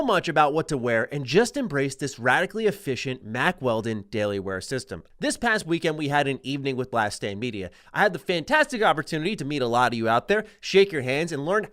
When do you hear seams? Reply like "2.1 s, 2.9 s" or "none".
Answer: 5.0 s